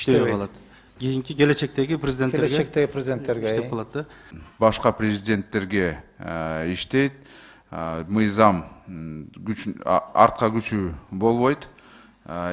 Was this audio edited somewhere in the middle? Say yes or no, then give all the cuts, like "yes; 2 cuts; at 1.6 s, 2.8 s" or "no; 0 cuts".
yes; 1 cut; at 4.3 s